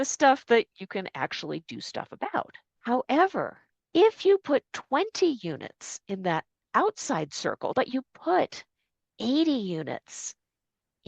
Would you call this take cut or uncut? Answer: cut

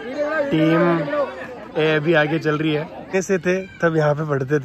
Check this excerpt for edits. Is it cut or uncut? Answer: cut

